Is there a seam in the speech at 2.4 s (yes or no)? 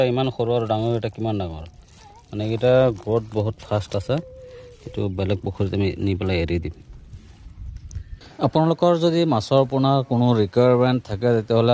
no